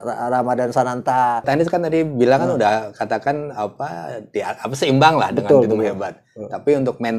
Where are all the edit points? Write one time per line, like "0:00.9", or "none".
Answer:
0:01.5